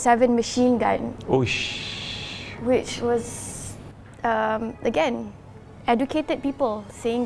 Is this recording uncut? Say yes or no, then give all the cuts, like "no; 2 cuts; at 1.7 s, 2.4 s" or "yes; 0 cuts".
yes; 0 cuts